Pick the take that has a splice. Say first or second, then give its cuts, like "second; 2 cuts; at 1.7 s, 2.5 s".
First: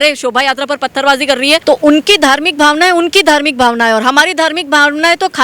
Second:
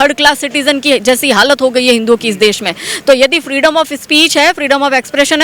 first; 1 cut; at 1.6 s